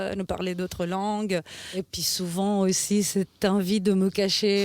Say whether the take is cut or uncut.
cut